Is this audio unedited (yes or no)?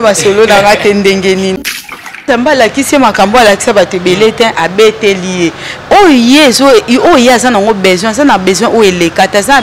no